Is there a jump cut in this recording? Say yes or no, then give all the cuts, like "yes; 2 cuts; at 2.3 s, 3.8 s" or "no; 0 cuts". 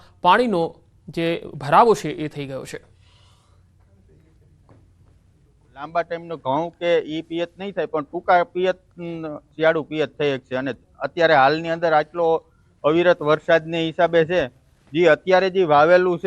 yes; 1 cut; at 11.8 s